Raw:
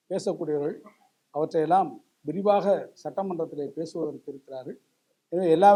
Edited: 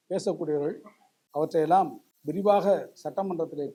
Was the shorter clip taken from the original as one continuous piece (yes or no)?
yes